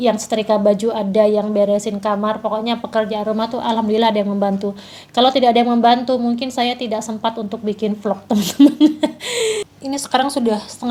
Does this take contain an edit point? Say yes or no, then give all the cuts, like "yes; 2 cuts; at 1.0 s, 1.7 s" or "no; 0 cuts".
yes; 1 cut; at 9.5 s